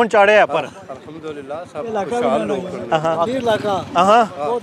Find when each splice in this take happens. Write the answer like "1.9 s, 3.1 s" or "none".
3.2 s